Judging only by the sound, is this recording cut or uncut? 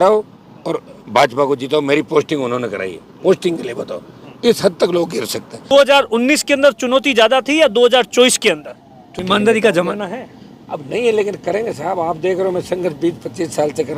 cut